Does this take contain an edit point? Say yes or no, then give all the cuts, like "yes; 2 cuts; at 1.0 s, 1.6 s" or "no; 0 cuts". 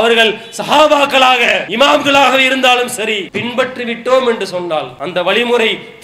yes; 3 cuts; at 1.6 s, 3.3 s, 5.0 s